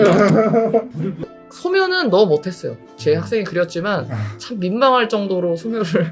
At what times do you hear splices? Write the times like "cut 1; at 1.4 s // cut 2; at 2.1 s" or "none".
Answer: cut 1; at 1.2 s